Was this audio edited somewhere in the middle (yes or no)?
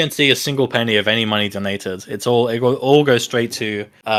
no